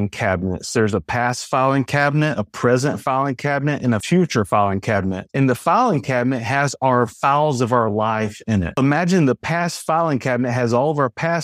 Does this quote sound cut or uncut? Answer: uncut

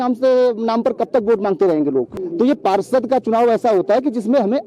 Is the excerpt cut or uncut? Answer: cut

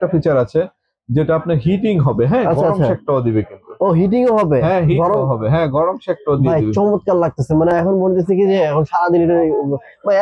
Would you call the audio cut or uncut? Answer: uncut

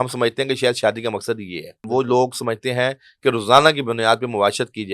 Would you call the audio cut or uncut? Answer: cut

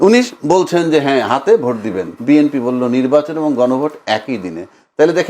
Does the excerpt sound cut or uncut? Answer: cut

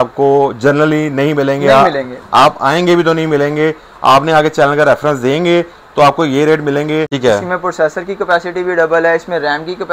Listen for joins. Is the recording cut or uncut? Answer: cut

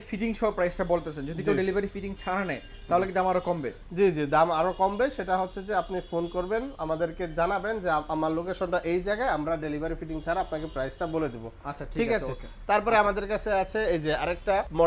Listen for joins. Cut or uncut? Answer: uncut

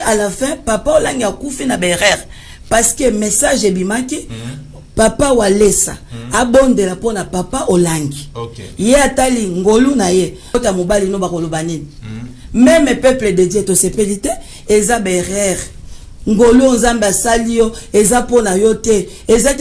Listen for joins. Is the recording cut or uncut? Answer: cut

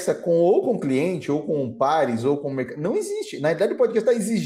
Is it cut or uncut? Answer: uncut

